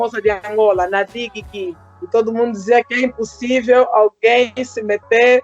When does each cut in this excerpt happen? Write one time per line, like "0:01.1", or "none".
none